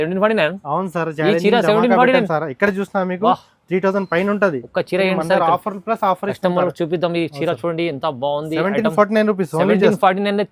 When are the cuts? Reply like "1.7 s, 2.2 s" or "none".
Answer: none